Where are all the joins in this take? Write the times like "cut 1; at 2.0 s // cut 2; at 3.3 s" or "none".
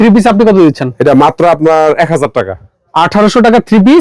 none

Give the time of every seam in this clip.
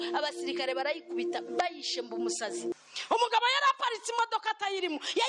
cut 1; at 2.7 s

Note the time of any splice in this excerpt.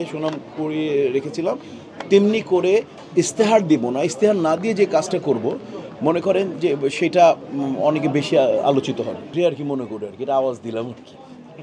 cut 1; at 9.2 s

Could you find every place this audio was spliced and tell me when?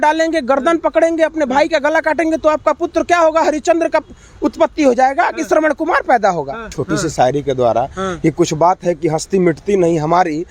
cut 1; at 6.7 s

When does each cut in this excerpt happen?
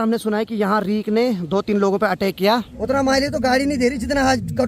cut 1; at 2.7 s

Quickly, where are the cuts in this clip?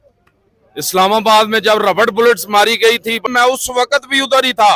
cut 1; at 3.3 s

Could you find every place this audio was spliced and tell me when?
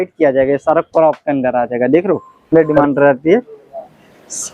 cut 1; at 2.5 s

